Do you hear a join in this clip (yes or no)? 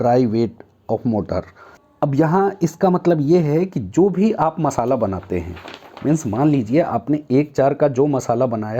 yes